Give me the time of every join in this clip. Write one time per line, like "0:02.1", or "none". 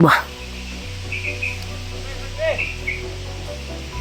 0:03.0